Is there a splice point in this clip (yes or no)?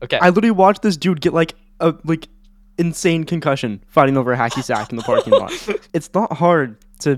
yes